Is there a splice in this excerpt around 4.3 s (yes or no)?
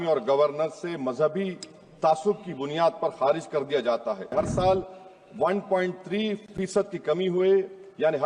yes